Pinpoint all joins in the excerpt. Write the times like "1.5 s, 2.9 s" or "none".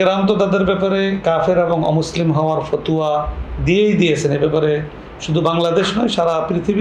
none